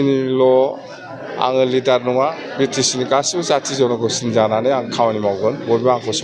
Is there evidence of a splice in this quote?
no; 0 cuts

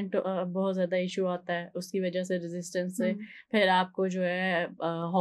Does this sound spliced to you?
no; 0 cuts

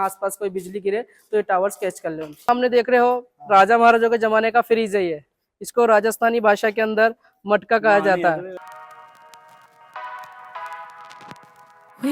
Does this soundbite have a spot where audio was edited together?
yes; 2 cuts; at 2.3 s, 8.5 s

